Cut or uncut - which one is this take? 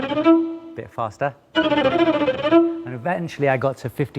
uncut